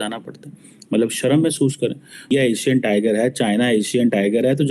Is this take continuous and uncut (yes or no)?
no